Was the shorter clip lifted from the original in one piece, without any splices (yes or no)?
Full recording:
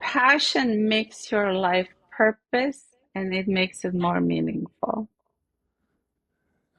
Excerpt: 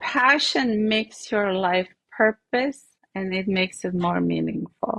yes